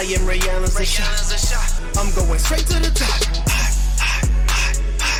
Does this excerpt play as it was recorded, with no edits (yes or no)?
yes